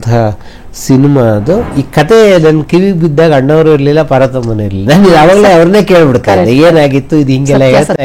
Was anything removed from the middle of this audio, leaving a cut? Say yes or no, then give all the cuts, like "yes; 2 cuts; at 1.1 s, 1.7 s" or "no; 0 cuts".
yes; 1 cut; at 1.7 s